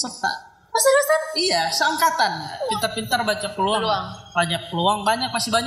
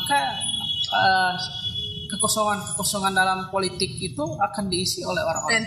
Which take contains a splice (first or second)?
first